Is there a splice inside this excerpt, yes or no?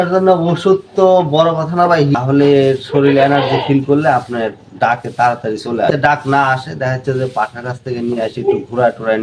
yes